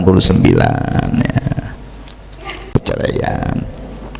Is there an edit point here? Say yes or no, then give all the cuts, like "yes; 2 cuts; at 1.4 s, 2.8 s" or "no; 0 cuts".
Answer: yes; 1 cut; at 2.7 s